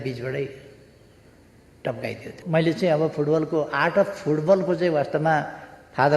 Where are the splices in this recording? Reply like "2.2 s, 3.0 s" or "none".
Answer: 2.3 s

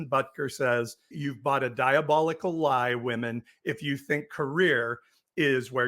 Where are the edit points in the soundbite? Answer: 1.2 s

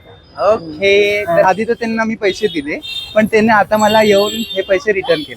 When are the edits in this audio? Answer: 1.4 s

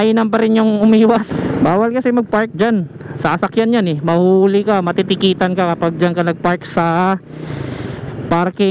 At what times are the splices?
1.3 s

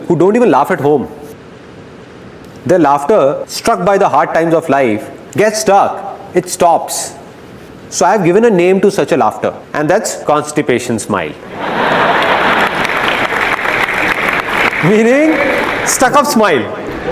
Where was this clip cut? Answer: none

